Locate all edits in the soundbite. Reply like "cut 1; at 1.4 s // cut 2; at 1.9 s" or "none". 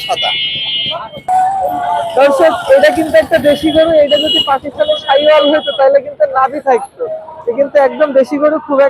cut 1; at 1.3 s